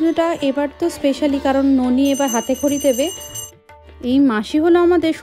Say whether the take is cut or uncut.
cut